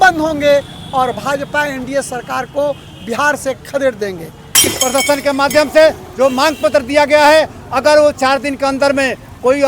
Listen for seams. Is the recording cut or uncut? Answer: cut